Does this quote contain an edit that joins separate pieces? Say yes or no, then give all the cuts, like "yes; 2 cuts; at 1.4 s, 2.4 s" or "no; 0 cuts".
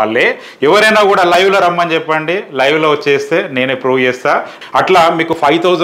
yes; 1 cut; at 4.6 s